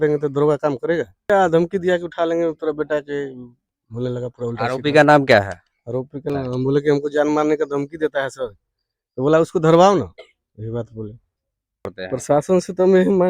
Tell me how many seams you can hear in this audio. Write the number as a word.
three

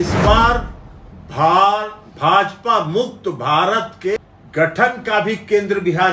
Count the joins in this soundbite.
one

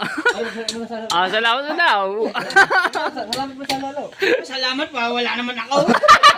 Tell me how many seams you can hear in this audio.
zero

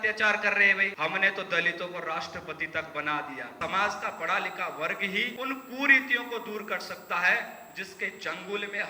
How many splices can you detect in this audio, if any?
three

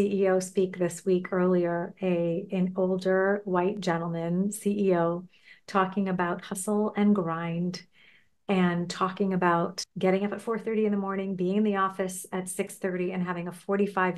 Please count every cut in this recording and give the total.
one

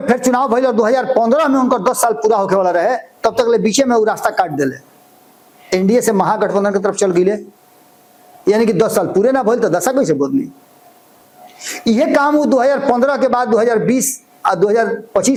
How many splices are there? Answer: zero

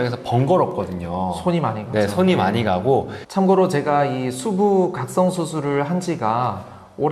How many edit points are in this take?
one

